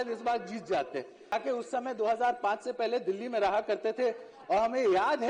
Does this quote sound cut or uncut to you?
cut